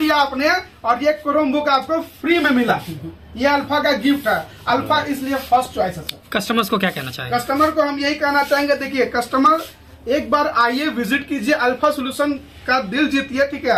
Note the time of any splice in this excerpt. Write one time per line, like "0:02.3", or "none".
none